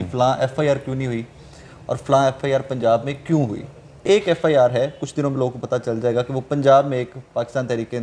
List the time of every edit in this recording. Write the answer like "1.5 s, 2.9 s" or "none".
4.0 s